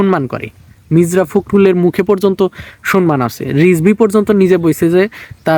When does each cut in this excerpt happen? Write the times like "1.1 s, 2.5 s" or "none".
none